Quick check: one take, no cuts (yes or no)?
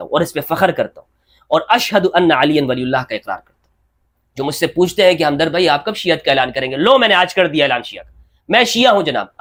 yes